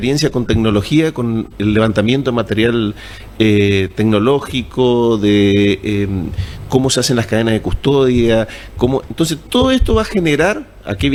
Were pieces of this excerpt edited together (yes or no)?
no